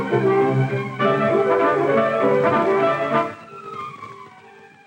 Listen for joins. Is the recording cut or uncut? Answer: cut